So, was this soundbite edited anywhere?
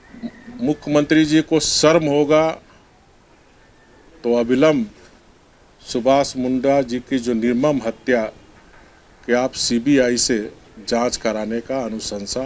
no; 0 cuts

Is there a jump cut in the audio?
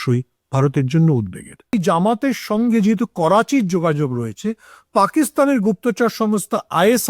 yes; 1 cut; at 1.7 s

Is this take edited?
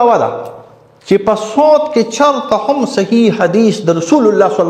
no; 0 cuts

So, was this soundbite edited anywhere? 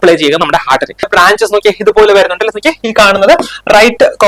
yes; 1 cut; at 1.1 s

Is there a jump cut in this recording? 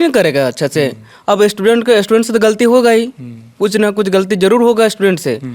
no; 0 cuts

